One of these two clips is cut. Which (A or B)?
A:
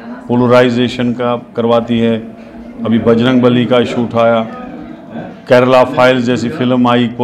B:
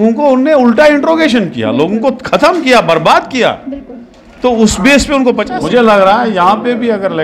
B